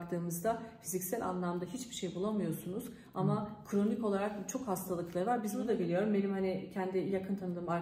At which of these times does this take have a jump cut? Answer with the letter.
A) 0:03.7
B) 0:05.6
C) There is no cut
B